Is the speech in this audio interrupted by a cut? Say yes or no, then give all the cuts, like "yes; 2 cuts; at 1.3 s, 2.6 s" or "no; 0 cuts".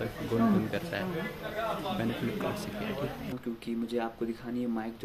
yes; 1 cut; at 3.4 s